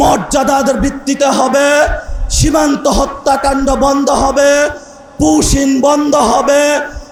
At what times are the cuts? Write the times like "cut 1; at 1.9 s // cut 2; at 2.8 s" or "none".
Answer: none